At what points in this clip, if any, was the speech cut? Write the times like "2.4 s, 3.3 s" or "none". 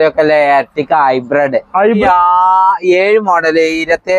2.0 s